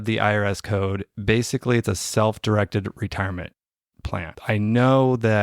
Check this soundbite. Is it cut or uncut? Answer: cut